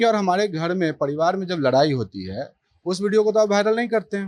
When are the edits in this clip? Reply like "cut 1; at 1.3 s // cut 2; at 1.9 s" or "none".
none